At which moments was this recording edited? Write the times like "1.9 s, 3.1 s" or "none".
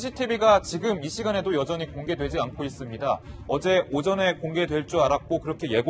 1.8 s